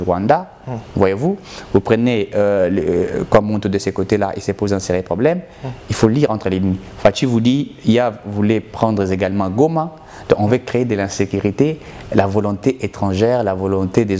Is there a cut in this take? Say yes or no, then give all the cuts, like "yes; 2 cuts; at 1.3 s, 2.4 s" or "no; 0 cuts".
no; 0 cuts